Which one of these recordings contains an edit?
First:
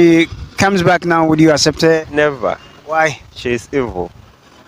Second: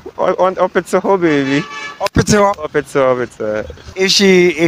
second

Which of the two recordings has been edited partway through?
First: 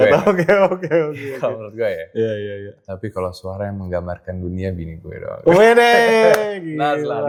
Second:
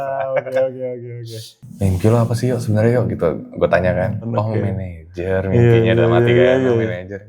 second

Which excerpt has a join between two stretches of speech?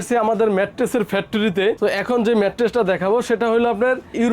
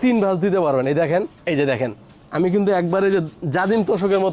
first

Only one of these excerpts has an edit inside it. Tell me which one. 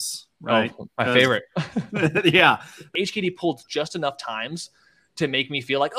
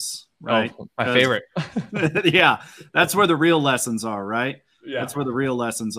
first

